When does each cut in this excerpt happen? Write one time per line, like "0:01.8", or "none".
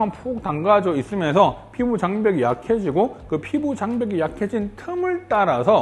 none